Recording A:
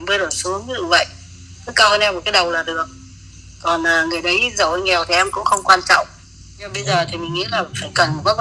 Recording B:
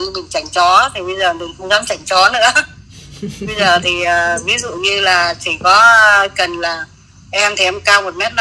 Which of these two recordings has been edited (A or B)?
A